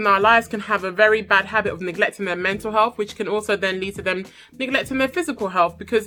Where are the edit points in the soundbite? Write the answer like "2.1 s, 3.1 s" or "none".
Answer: none